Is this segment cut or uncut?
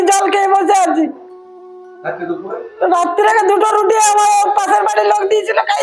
uncut